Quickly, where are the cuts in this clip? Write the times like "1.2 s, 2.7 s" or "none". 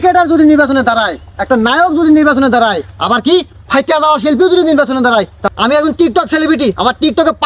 5.4 s

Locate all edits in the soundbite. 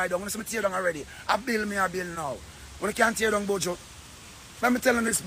none

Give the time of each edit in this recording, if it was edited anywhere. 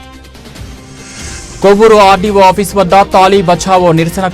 1.2 s

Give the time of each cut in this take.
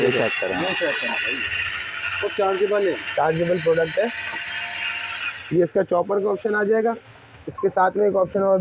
none

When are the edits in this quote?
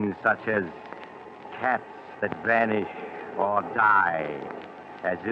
3.7 s

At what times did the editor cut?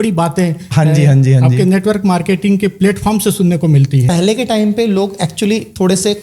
4.1 s

